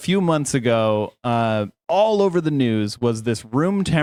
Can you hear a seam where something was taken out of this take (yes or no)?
no